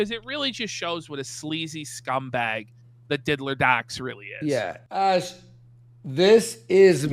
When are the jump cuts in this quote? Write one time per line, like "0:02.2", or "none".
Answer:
0:04.8